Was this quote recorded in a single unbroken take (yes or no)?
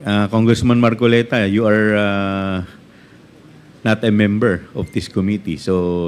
yes